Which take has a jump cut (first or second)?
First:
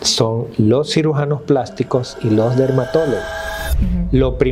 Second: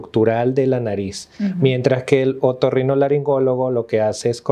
first